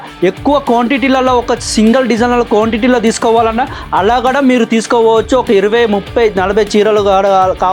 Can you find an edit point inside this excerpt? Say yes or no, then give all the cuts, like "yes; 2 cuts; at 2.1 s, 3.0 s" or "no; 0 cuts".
no; 0 cuts